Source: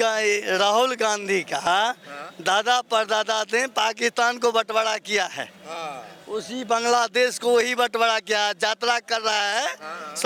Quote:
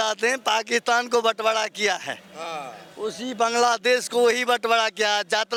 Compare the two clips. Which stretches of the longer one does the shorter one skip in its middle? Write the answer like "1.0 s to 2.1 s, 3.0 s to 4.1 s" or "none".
none